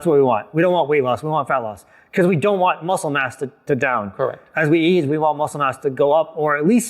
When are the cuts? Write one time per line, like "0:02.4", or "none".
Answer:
0:04.4

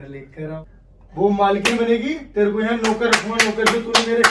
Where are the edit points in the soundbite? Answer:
0:01.2

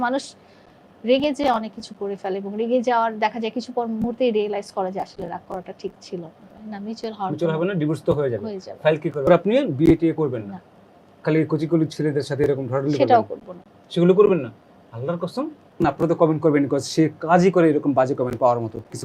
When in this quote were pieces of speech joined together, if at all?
0:06.6
0:09.3
0:15.6

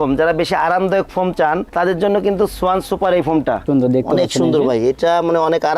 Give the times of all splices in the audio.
0:03.6

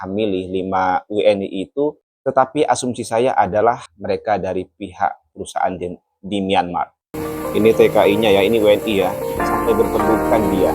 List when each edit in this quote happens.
0:02.1
0:03.9
0:07.1

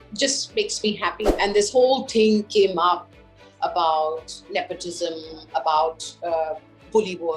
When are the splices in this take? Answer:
0:01.2

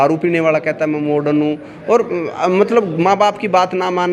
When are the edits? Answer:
none

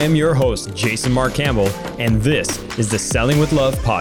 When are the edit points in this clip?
none

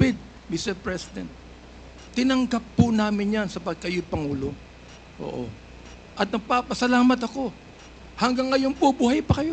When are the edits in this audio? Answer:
none

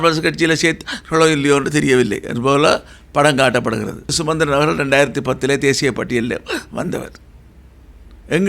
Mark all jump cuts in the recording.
0:04.2

